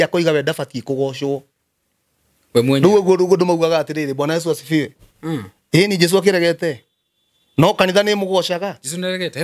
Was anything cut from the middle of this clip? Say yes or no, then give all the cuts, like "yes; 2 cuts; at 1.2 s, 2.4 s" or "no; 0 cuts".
no; 0 cuts